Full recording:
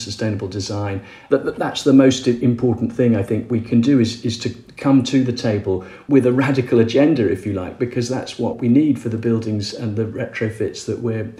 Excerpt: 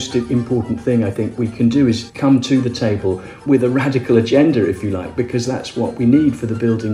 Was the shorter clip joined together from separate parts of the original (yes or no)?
yes